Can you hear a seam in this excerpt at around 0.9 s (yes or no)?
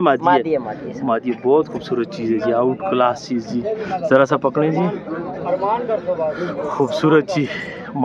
no